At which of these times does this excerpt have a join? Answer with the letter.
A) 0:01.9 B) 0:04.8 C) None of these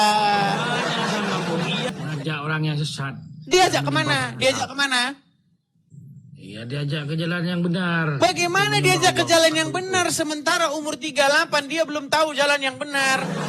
A